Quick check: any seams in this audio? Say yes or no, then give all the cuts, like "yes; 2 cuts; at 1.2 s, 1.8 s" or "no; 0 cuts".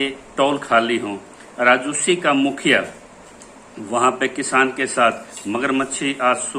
no; 0 cuts